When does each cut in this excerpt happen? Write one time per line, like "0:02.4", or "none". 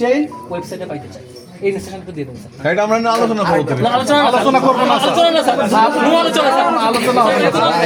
none